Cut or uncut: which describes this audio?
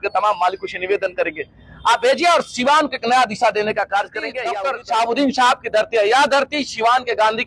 cut